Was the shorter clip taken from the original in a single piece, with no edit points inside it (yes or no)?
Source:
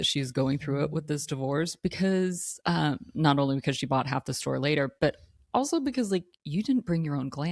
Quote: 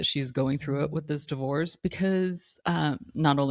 yes